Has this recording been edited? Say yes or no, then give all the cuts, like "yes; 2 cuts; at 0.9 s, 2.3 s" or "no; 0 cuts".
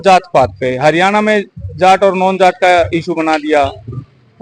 no; 0 cuts